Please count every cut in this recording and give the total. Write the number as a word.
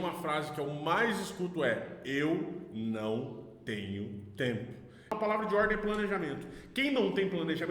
one